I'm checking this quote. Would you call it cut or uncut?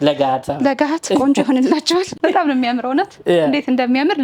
cut